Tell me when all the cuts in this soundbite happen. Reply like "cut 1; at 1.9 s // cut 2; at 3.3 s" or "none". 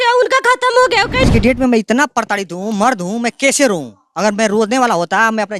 cut 1; at 1.2 s

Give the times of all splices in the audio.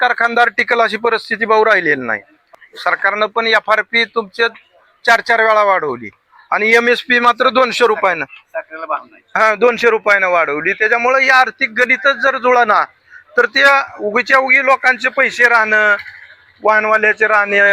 cut 1; at 2.5 s

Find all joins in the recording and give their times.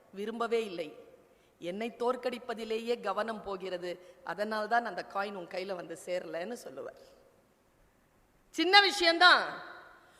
none

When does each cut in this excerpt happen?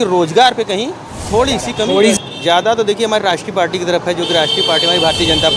cut 1; at 2.2 s

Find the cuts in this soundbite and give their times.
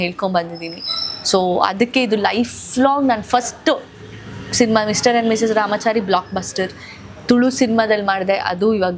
none

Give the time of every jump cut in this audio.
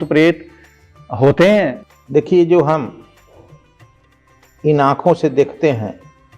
cut 1; at 1.8 s

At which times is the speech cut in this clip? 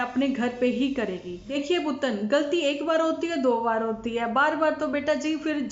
cut 1; at 1.4 s

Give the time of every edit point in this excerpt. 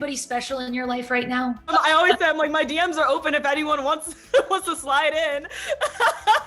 cut 1; at 1.7 s

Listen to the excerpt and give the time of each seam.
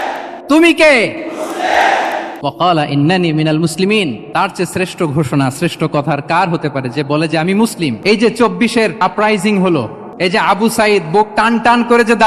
cut 1; at 2.3 s // cut 2; at 4.2 s // cut 3; at 8.0 s // cut 4; at 9.0 s // cut 5; at 10.0 s

